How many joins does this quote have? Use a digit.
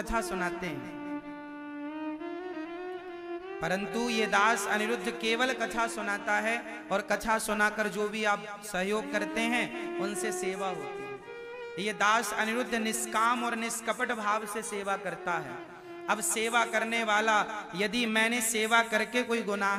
0